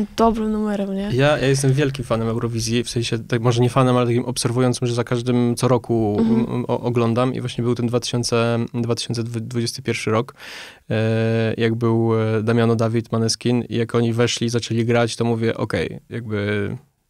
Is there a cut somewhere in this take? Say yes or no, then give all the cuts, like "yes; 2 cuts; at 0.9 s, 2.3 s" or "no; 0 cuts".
no; 0 cuts